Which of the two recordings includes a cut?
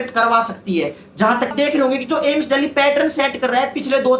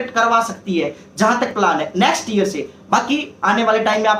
first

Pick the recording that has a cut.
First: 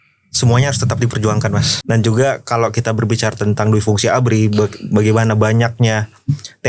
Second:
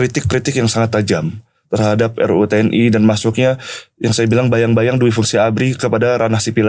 first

